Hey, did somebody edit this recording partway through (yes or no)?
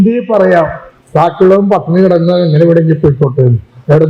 no